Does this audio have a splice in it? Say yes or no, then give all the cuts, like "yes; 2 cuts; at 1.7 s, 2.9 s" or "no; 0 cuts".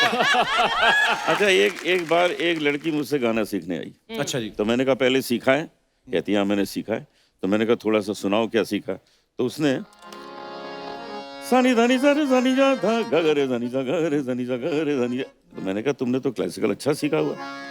yes; 1 cut; at 1.2 s